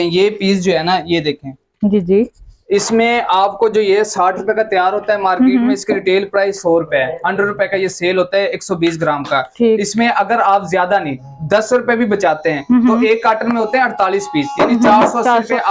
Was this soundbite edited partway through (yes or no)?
no